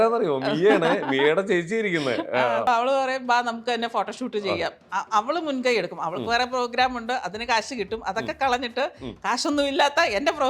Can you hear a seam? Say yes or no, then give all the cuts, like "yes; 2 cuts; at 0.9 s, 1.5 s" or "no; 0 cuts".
yes; 1 cut; at 2.6 s